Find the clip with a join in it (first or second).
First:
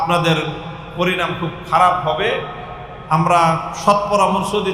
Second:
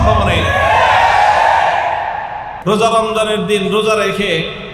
second